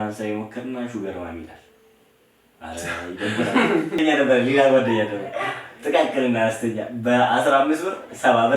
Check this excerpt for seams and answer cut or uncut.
cut